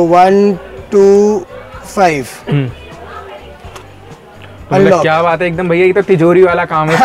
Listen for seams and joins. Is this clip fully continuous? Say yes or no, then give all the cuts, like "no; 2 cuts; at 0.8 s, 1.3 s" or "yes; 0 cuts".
yes; 0 cuts